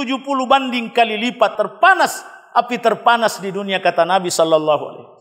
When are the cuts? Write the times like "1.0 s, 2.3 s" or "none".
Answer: 1.5 s